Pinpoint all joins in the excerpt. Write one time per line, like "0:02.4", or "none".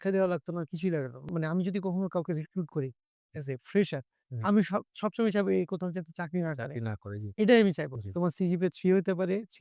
0:01.3
0:07.9